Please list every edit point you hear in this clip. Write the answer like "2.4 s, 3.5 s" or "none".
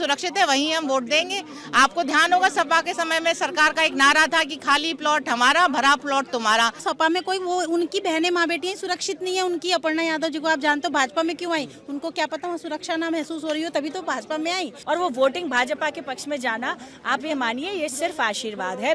6.8 s, 14.7 s